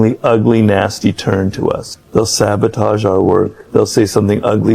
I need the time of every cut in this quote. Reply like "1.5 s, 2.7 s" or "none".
1.9 s, 3.6 s